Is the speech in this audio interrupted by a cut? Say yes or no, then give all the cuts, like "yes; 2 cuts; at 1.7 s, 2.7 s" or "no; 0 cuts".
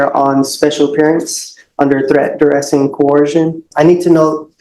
yes; 1 cut; at 3.7 s